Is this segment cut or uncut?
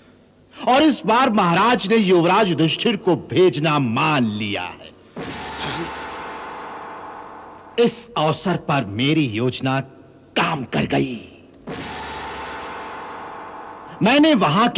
uncut